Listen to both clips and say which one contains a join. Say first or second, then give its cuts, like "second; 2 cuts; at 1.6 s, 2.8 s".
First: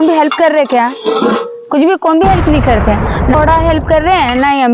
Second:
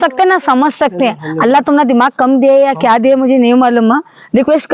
first; 1 cut; at 3.3 s